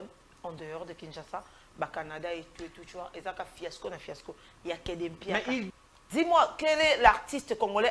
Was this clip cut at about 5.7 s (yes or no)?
yes